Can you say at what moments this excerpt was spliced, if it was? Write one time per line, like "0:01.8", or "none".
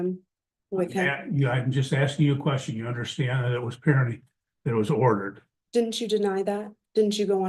none

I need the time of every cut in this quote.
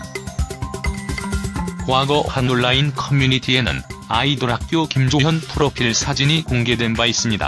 0:05.5

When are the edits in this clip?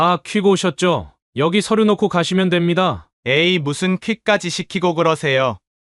0:01.2
0:03.1

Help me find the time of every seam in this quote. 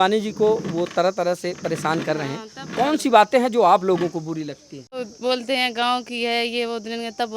0:05.1

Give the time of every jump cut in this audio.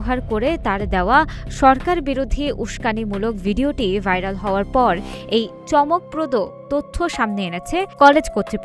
none

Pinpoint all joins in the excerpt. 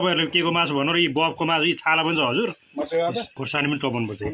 0:03.3

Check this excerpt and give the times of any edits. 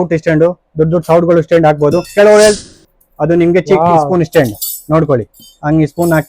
0:02.6

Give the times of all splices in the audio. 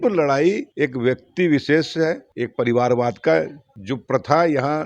0:02.3

